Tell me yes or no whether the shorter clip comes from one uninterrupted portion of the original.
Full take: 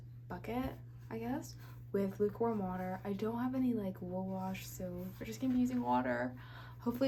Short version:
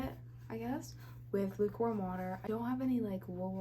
no